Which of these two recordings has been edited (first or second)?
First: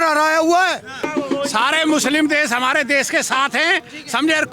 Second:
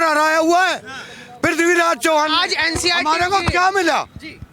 first